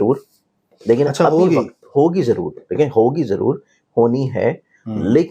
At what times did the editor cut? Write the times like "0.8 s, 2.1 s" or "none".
none